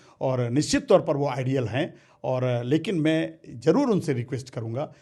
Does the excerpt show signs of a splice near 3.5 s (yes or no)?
no